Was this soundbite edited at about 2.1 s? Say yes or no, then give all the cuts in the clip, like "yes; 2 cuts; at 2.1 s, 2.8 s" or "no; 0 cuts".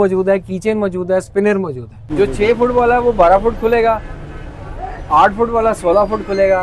yes; 1 cut; at 2.1 s